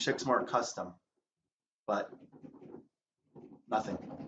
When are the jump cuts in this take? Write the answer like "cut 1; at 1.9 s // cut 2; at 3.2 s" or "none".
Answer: none